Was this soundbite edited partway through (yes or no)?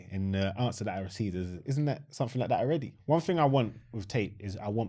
yes